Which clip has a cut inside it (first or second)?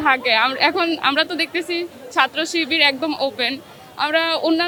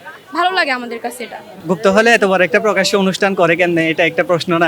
second